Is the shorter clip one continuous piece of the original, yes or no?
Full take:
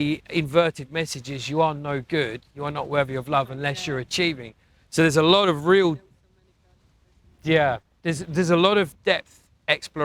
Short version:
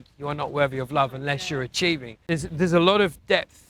no